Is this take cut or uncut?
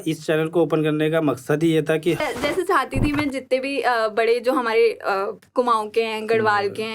cut